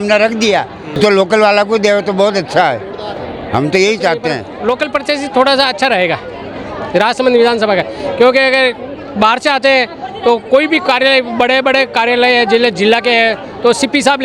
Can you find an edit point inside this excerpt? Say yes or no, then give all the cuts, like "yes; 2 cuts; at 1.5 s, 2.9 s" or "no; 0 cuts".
yes; 2 cuts; at 1.0 s, 4.5 s